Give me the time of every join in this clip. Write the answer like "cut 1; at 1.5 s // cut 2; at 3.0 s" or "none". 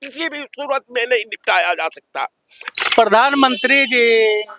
cut 1; at 2.7 s